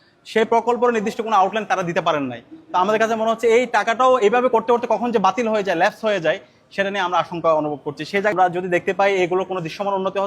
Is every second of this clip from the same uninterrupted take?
no; 1 cut; at 8.3 s

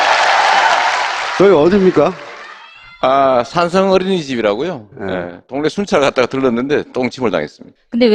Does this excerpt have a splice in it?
no; 0 cuts

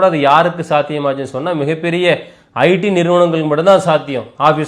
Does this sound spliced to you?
no; 0 cuts

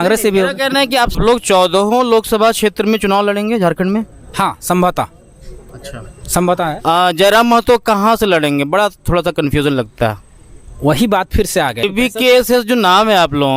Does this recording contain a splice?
yes; 2 cuts; at 1.2 s, 11.8 s

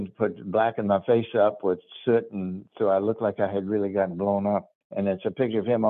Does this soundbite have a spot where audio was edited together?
yes; 1 cut; at 4.7 s

